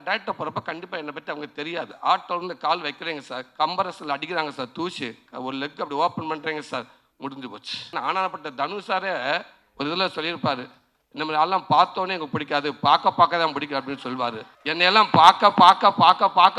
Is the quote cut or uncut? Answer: cut